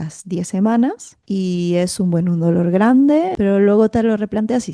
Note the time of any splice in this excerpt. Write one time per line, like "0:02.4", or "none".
0:01.1
0:03.3